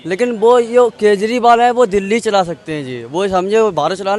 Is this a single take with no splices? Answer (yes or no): yes